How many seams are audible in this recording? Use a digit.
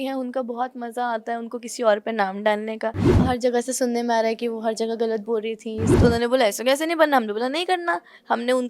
2